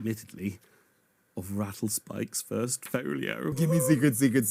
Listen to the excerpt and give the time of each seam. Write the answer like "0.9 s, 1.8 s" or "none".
3.6 s